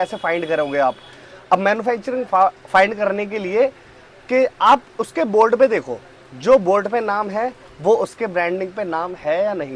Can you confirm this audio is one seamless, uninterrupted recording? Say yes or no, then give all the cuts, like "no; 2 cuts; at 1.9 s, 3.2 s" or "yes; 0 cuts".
yes; 0 cuts